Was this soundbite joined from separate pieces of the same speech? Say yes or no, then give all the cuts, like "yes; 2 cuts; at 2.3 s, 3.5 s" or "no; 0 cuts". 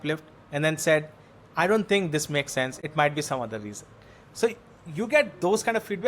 no; 0 cuts